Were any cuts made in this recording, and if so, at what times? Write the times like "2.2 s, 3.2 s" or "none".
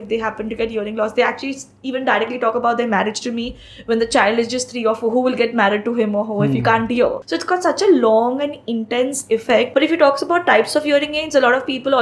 7.3 s, 9.7 s